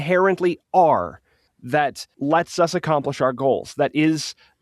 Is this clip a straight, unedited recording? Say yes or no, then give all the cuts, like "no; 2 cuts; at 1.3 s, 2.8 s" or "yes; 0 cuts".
no; 1 cut; at 2.1 s